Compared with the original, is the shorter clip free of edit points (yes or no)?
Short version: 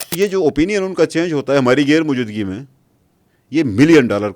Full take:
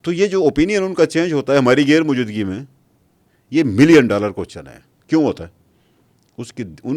yes